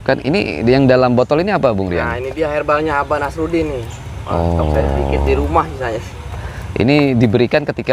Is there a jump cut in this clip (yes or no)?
no